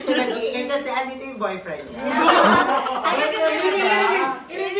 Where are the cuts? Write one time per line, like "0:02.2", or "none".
none